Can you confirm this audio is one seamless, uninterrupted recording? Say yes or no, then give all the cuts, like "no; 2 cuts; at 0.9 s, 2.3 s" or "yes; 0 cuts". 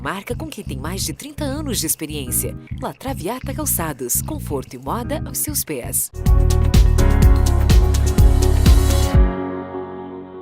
no; 1 cut; at 6.3 s